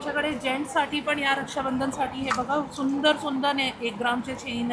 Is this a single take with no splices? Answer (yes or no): yes